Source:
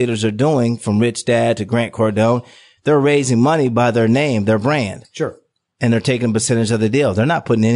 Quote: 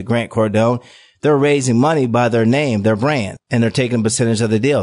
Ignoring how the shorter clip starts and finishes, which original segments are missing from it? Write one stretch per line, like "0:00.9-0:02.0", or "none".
0:05.0-0:05.7